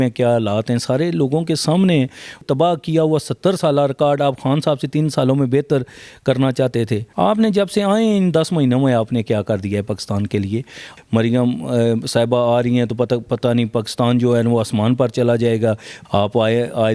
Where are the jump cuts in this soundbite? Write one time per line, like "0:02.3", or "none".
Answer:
0:02.4
0:07.0
0:10.9
0:15.9